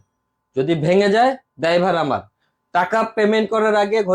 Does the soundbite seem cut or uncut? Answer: uncut